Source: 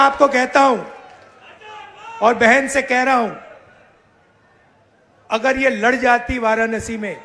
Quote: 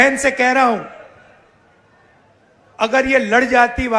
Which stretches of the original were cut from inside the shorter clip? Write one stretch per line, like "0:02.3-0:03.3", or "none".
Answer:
none